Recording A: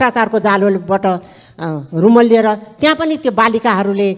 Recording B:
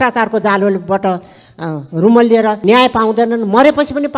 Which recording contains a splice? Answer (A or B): B